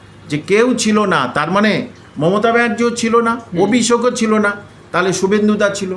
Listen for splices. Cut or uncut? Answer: uncut